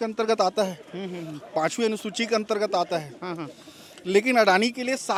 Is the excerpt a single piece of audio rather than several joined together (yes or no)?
yes